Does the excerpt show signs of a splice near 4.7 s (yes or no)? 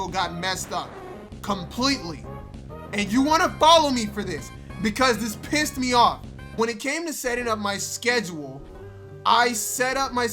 no